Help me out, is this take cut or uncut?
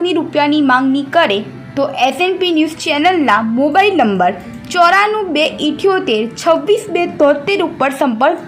uncut